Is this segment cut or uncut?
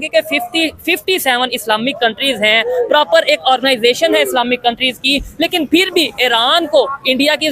uncut